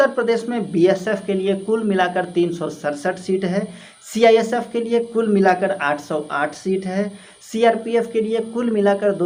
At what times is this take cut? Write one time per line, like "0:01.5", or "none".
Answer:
none